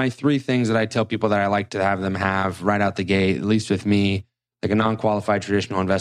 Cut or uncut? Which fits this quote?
uncut